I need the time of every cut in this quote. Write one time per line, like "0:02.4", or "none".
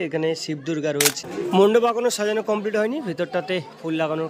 0:01.2